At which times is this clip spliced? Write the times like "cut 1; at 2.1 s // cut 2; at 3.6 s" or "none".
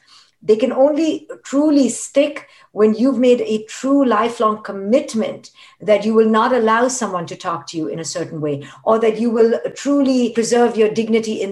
cut 1; at 8.7 s